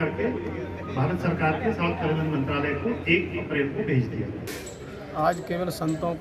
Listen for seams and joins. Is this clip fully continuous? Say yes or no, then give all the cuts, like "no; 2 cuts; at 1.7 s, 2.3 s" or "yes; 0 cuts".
no; 1 cut; at 4.5 s